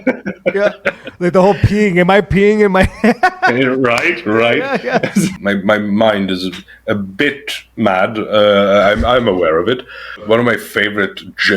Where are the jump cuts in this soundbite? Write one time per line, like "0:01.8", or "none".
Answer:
0:05.3
0:10.2